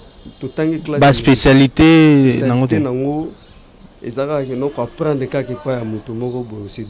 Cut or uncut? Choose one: uncut